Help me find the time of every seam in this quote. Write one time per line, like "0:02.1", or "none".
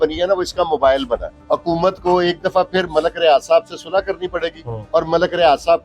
0:01.3
0:04.7